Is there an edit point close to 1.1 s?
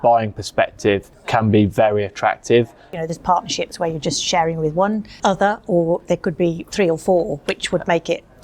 yes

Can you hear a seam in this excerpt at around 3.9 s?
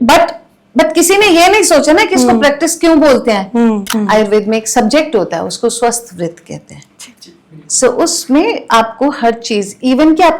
yes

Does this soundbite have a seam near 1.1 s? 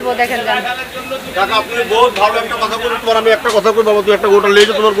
no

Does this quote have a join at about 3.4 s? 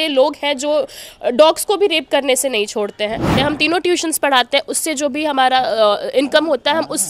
yes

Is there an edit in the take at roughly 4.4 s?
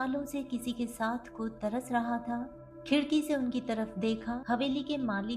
yes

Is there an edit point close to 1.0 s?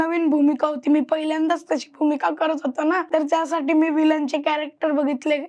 no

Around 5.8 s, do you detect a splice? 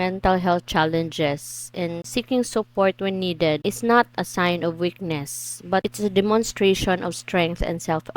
yes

